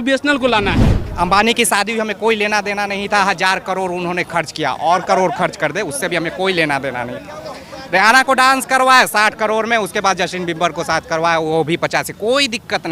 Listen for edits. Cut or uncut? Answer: cut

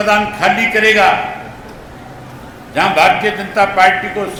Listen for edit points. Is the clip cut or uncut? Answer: uncut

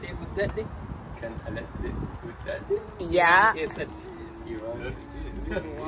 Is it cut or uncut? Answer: uncut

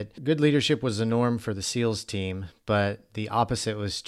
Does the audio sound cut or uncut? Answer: uncut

